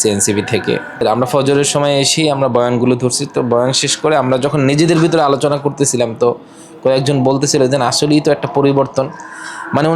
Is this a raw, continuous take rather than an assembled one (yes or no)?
yes